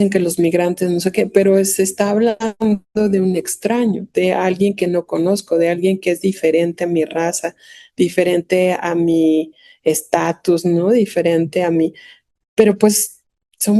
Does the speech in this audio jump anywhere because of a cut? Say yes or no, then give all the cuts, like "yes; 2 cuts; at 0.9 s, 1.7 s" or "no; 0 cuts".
no; 0 cuts